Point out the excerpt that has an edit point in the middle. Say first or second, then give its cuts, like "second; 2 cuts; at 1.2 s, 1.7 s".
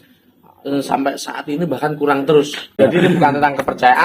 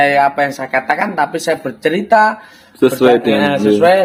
first; 1 cut; at 2.8 s